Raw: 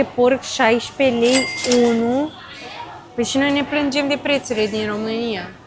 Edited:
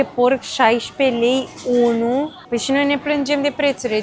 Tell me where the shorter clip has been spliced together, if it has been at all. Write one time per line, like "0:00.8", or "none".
0:02.4

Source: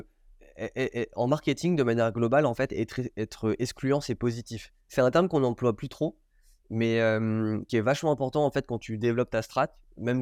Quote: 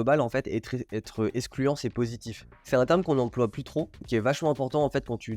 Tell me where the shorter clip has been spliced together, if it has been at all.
0:04.0

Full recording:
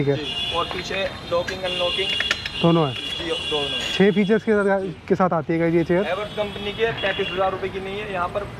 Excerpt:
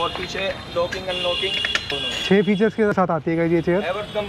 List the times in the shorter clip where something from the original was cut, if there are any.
0:02.0
0:02.9

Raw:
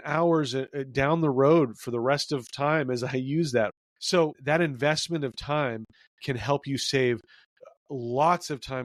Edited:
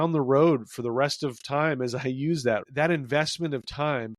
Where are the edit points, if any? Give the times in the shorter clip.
0:02.7

